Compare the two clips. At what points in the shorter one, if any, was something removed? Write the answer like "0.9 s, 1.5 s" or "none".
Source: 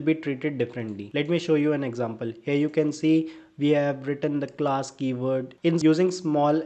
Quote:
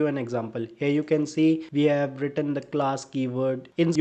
1.7 s